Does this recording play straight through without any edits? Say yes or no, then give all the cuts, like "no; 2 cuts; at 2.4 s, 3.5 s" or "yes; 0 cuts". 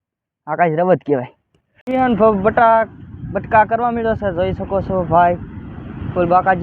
no; 1 cut; at 1.8 s